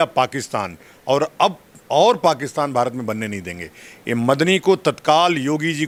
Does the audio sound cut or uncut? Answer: uncut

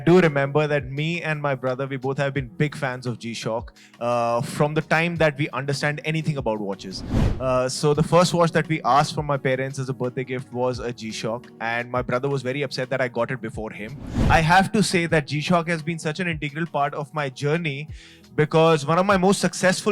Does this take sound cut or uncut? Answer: cut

